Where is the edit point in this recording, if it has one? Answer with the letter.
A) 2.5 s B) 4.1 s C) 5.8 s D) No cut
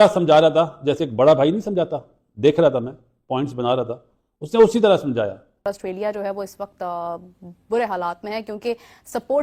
C